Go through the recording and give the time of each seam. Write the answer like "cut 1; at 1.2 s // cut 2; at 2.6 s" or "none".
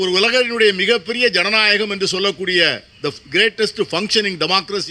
none